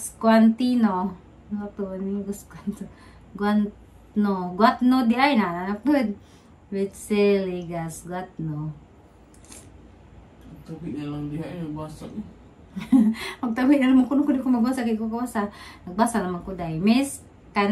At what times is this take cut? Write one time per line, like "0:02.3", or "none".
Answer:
0:03.4